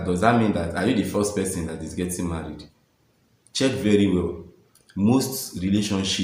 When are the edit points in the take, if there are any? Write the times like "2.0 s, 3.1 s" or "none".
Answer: none